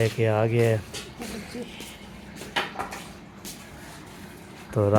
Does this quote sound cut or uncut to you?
uncut